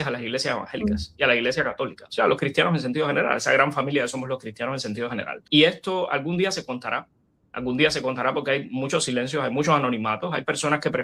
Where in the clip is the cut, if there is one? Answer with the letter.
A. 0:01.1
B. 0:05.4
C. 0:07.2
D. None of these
B